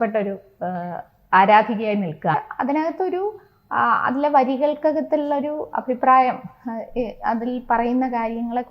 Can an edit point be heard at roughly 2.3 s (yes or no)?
yes